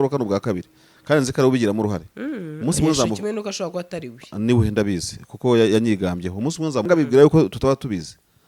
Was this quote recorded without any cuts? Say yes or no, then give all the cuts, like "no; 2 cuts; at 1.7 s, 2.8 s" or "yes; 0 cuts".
no; 1 cut; at 6.9 s